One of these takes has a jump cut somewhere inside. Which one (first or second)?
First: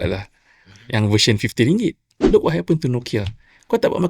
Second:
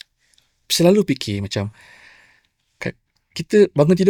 first